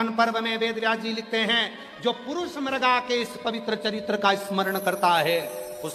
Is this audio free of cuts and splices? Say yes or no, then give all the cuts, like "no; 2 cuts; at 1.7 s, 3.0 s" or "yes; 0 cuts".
yes; 0 cuts